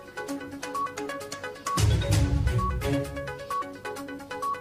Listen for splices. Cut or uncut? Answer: uncut